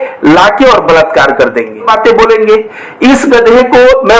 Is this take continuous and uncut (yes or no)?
no